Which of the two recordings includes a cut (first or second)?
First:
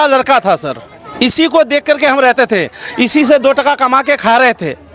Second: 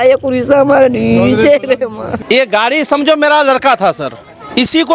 second